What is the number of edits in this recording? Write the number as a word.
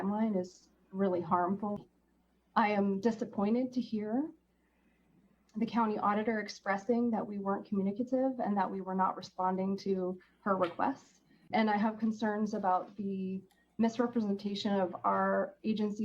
two